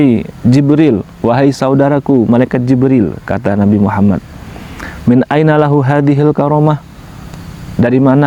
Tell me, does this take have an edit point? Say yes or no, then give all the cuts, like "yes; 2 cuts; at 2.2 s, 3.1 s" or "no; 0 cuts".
no; 0 cuts